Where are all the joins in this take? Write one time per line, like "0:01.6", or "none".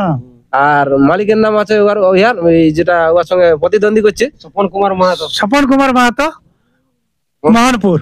none